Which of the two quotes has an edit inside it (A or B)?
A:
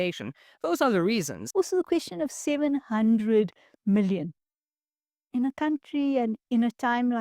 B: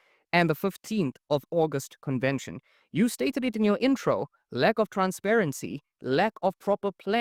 A